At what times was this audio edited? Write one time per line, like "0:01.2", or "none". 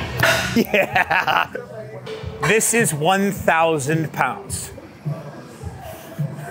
none